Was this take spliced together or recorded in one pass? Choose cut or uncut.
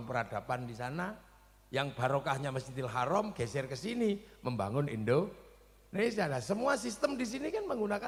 uncut